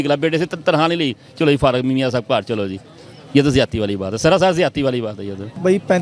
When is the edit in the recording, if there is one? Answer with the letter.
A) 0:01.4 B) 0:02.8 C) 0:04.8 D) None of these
D